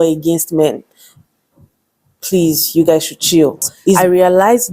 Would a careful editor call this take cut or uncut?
cut